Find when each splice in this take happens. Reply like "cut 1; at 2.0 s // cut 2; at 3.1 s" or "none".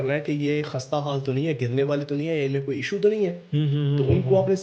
none